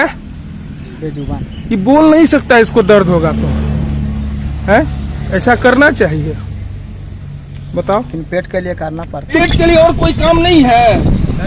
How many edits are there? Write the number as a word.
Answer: one